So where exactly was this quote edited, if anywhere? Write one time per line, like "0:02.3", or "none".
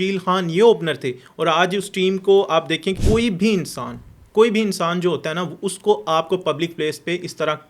0:02.9